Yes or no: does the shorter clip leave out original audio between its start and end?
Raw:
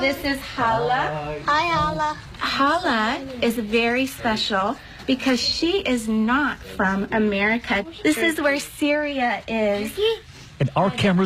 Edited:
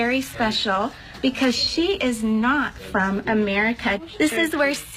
no